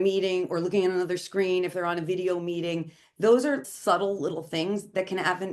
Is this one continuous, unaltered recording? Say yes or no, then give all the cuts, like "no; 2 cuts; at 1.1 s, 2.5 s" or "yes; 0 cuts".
no; 1 cut; at 3.7 s